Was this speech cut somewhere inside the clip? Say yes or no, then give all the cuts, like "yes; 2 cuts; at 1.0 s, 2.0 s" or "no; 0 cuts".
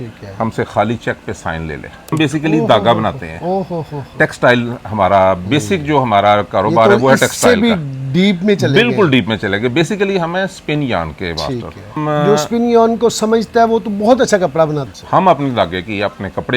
yes; 3 cuts; at 2.1 s, 12.0 s, 14.8 s